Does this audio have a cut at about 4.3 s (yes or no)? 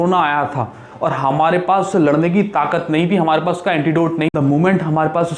yes